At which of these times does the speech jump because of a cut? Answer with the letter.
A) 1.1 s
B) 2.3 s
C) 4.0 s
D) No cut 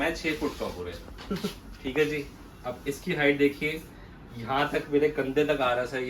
D